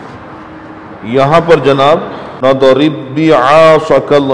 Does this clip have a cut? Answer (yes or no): yes